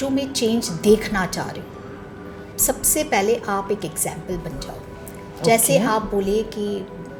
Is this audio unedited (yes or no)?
yes